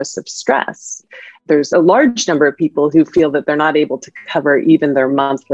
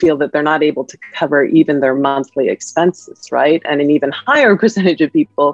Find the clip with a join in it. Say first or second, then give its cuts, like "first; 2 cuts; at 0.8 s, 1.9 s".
first; 1 cut; at 1.4 s